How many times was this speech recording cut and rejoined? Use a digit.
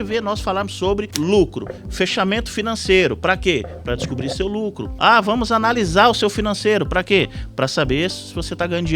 2